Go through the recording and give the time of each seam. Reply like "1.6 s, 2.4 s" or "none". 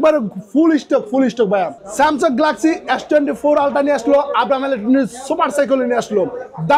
1.8 s